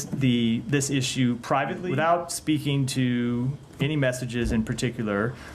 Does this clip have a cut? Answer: yes; 1 cut; at 1.8 s

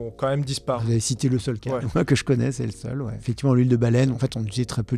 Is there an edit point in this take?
yes; 4 cuts; at 0.8 s, 1.9 s, 3.2 s, 4.2 s

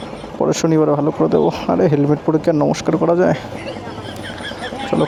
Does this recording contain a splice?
no; 0 cuts

